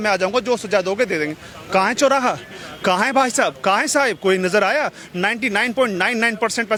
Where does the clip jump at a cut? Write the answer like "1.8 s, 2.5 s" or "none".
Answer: none